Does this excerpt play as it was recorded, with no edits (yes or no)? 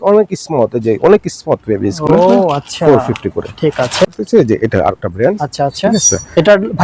yes